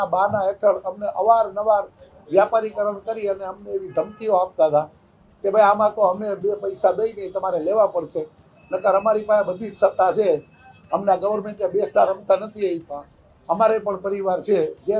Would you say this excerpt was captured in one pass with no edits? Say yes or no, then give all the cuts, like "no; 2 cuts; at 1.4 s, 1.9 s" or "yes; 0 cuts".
yes; 0 cuts